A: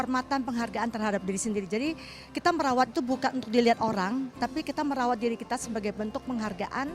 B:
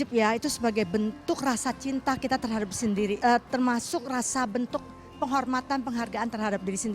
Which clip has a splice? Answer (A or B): B